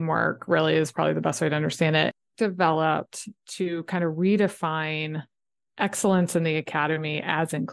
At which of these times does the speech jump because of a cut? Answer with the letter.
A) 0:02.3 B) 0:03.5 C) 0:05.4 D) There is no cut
A